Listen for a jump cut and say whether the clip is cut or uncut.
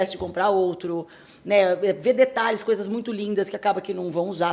uncut